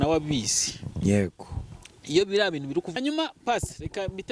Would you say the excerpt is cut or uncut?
cut